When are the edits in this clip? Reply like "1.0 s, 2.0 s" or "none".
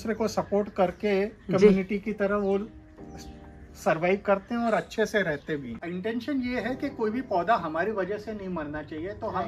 5.8 s